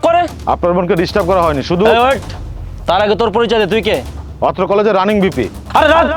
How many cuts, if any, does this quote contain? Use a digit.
1